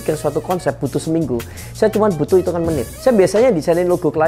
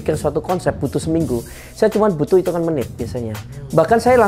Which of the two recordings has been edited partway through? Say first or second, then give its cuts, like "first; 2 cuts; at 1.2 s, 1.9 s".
first; 1 cut; at 2.9 s